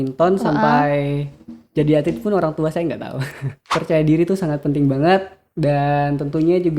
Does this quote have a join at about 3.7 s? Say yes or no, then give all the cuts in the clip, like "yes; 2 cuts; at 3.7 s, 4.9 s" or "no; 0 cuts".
yes; 1 cut; at 3.7 s